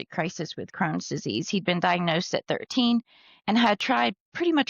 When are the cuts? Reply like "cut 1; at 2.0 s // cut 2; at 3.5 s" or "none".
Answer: none